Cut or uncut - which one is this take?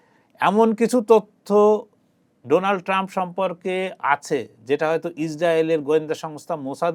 uncut